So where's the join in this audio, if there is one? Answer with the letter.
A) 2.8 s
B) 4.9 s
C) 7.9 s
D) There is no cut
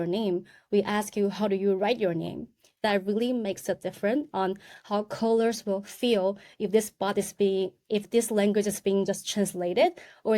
A